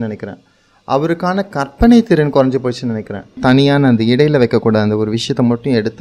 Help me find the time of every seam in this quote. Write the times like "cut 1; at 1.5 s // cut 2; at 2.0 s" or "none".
cut 1; at 3.3 s